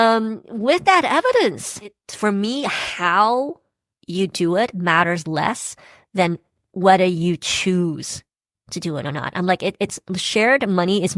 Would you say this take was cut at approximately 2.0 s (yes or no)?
yes